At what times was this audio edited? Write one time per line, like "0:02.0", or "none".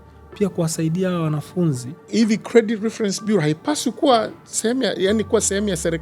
0:02.1